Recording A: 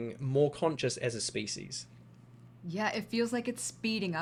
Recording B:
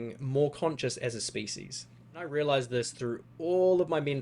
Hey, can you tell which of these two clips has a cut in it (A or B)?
B